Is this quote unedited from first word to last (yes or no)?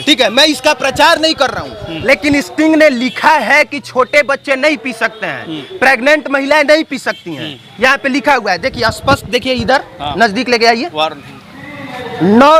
yes